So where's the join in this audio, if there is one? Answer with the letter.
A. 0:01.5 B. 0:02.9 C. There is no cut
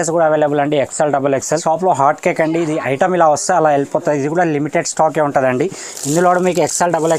A